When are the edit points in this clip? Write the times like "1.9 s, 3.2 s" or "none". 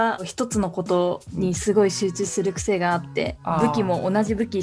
none